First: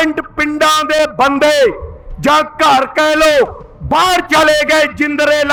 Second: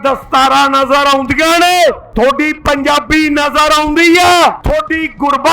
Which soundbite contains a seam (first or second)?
second